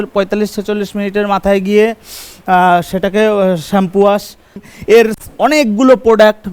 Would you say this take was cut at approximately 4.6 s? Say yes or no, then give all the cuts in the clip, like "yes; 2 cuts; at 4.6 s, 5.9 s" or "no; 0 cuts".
yes; 1 cut; at 4.6 s